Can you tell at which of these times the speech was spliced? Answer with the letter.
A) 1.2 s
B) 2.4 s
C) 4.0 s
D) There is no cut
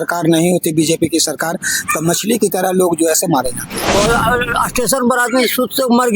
C